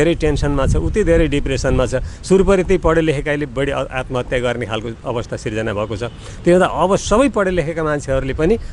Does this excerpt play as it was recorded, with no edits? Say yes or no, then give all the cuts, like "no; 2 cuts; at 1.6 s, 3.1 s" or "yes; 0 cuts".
yes; 0 cuts